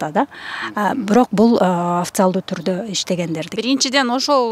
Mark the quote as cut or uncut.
cut